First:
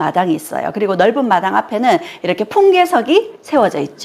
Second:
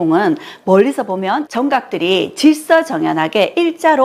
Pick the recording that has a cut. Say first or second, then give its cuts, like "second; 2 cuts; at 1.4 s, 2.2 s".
second; 1 cut; at 1.4 s